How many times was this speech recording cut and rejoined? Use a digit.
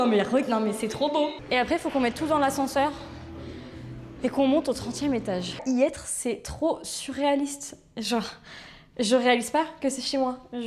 2